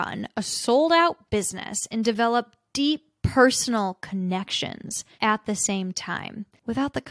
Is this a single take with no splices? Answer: yes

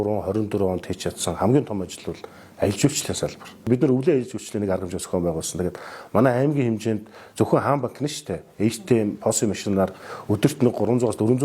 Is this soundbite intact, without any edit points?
no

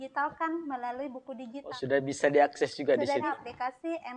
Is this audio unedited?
no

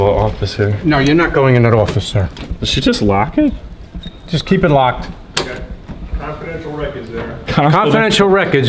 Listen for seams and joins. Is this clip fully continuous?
yes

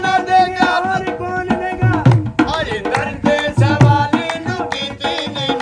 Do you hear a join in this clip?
no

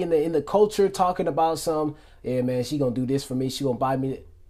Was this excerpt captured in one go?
yes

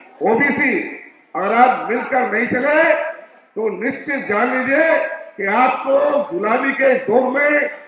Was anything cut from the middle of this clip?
no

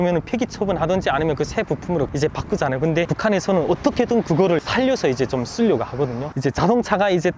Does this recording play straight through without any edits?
no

